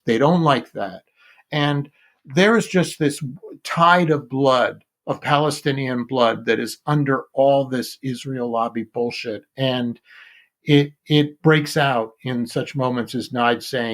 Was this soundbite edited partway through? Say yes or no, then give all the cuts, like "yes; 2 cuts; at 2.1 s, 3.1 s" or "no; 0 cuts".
no; 0 cuts